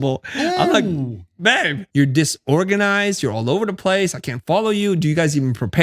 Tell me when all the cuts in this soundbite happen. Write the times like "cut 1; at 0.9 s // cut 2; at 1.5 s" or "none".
cut 1; at 1.8 s